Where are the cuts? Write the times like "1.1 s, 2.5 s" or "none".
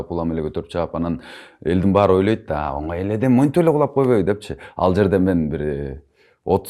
none